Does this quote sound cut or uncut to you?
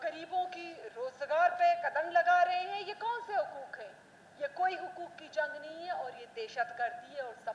uncut